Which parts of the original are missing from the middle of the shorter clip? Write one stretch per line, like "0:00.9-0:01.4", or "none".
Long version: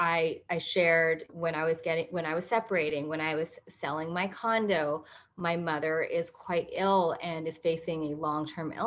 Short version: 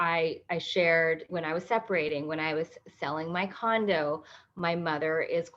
0:01.3-0:02.1